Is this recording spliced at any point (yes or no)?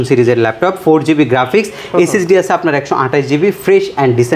no